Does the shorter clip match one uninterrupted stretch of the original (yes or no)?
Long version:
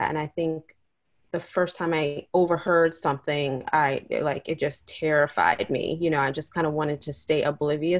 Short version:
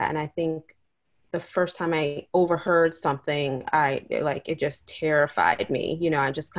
yes